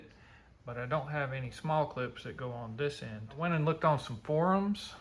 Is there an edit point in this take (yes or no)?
yes